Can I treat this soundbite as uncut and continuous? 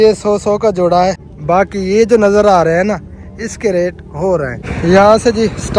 no; 2 cuts; at 1.3 s, 4.6 s

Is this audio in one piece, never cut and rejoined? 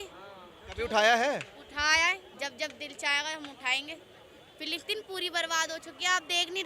yes; 0 cuts

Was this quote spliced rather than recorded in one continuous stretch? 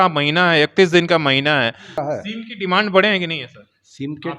yes; 1 cut; at 2.0 s

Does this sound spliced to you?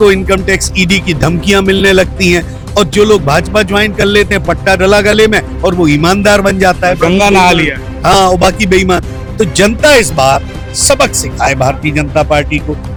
no; 0 cuts

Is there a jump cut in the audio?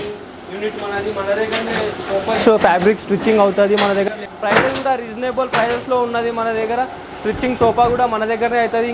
yes; 1 cut; at 4.3 s

